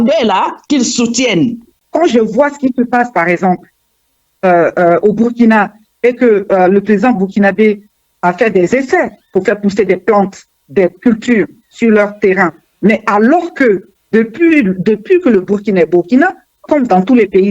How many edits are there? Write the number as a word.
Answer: three